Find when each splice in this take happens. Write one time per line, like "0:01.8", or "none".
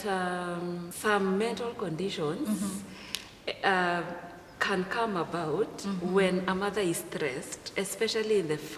0:00.9